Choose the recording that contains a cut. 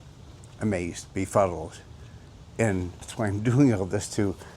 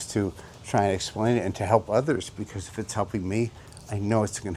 first; 1 cut; at 3.0 s

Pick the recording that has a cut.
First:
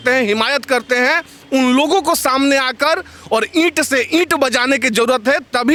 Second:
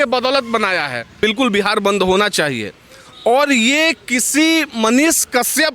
second; 1 cut; at 1.2 s

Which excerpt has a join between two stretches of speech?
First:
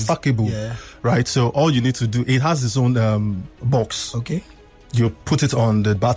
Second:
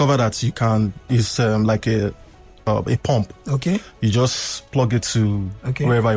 second; 1 cut; at 2.7 s

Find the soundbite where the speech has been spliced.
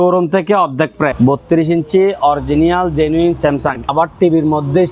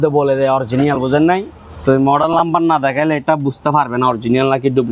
first; 2 cuts; at 1.1 s, 3.9 s

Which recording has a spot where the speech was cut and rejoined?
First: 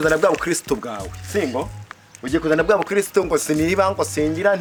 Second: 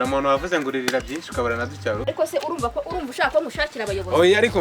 second; 1 cut; at 2.0 s

